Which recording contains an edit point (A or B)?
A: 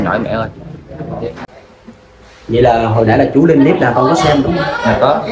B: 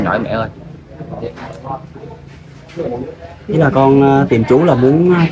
A